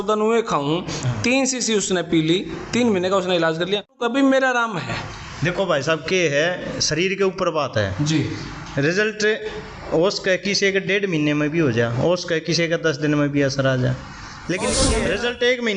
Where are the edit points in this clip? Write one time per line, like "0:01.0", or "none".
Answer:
0:04.0
0:15.0